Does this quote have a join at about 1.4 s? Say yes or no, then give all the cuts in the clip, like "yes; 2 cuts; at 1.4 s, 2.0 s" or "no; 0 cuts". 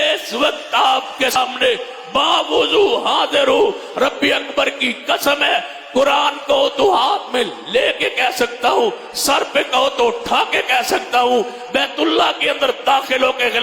yes; 1 cut; at 1.4 s